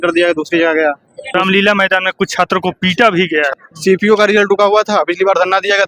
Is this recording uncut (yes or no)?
no